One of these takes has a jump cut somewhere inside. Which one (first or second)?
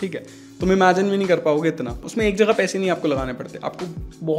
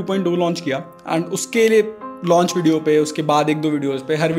first